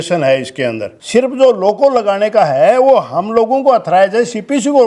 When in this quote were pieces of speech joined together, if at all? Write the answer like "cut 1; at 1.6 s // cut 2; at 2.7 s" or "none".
cut 1; at 0.9 s